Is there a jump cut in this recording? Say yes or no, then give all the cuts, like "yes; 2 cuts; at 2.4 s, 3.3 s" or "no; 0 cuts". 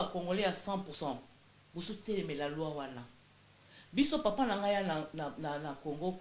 yes; 1 cut; at 0.9 s